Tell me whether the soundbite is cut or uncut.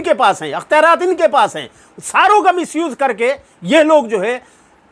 uncut